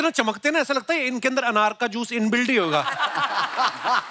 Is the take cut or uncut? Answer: uncut